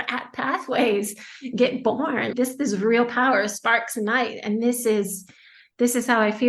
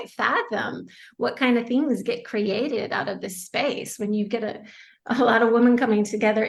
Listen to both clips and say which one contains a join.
first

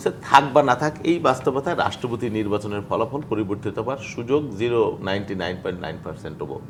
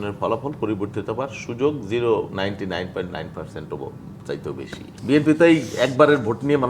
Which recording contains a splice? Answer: second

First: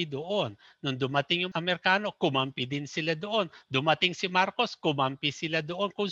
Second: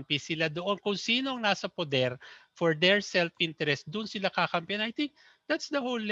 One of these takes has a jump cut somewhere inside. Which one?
first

